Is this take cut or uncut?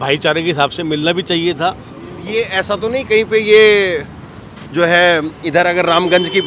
uncut